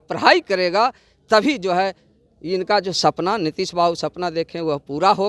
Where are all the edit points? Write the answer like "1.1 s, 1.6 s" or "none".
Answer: none